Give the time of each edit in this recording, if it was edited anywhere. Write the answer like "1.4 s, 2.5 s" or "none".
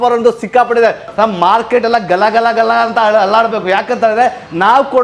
1.0 s